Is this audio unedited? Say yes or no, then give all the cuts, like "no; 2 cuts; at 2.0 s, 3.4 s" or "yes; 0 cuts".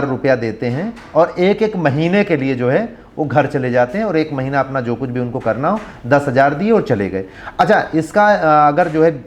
yes; 0 cuts